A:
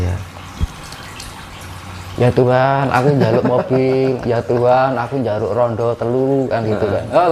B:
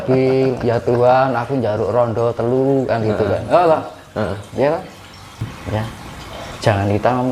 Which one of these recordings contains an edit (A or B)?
B